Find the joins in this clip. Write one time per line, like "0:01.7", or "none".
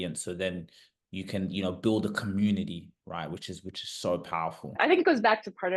0:04.8